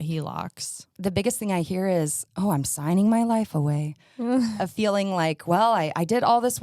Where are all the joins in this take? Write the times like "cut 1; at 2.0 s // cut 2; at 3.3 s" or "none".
cut 1; at 0.9 s // cut 2; at 4.6 s